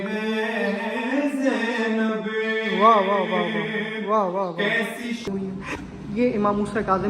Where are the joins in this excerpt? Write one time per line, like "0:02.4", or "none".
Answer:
0:05.3